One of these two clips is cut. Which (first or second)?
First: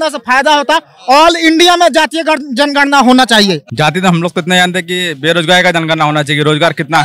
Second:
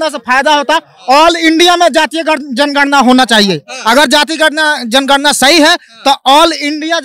first